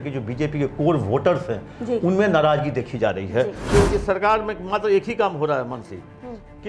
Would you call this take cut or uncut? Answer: cut